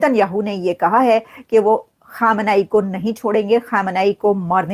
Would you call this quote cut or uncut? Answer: uncut